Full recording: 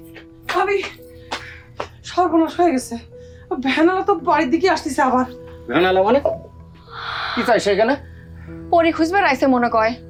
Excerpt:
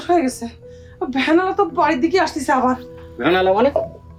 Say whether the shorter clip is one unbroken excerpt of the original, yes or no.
yes